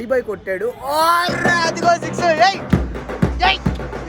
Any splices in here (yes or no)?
no